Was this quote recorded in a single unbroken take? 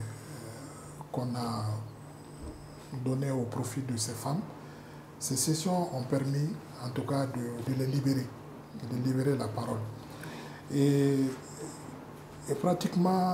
yes; 0 cuts

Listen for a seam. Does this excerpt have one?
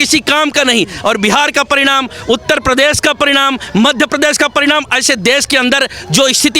no; 0 cuts

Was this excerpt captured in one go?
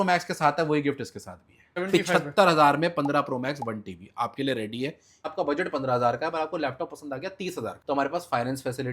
no; 2 cuts; at 1.8 s, 5.3 s

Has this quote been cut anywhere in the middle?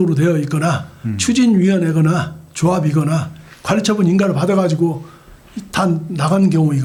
no; 0 cuts

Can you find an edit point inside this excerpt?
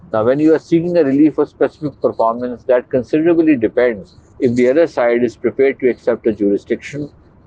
no; 0 cuts

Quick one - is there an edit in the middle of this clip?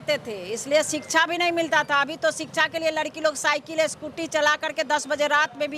no; 0 cuts

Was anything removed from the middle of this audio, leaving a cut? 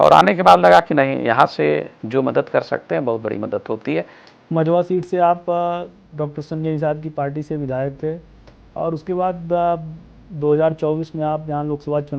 yes; 1 cut; at 4.2 s

